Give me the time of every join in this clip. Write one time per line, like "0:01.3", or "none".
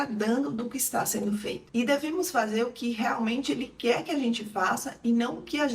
0:01.6